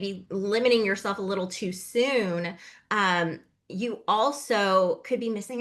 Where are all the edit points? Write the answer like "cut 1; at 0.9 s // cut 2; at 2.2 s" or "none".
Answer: none